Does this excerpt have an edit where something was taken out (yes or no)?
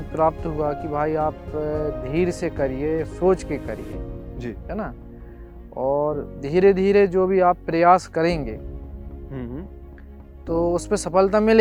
no